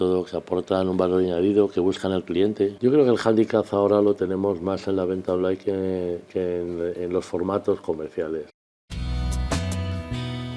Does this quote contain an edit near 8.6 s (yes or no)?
yes